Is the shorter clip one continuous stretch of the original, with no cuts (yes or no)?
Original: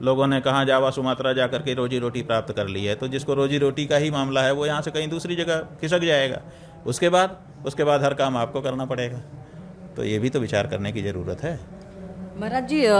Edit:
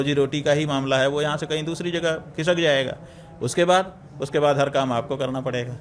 yes